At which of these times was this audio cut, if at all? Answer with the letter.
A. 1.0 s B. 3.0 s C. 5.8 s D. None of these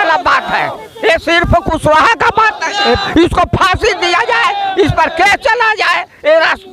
B